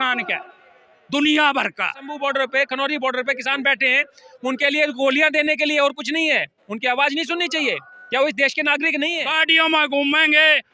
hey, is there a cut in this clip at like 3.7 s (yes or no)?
no